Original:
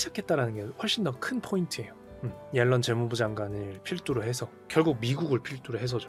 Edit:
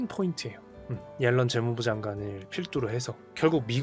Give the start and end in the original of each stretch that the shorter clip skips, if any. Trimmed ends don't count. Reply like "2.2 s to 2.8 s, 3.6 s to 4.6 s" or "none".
none